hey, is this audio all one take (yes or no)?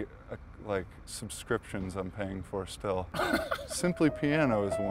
no